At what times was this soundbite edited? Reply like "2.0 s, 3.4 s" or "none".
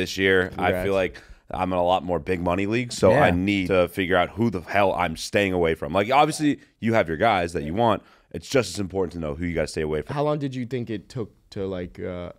3.6 s, 10.1 s